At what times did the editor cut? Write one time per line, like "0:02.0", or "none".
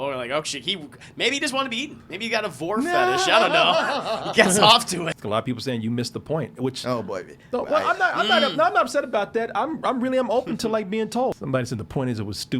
0:05.1
0:11.4